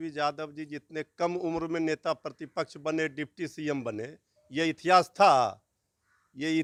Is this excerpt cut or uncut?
uncut